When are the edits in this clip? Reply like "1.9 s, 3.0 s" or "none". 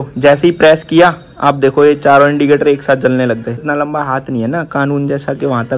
3.6 s